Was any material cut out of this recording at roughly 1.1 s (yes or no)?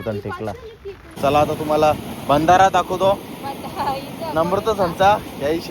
yes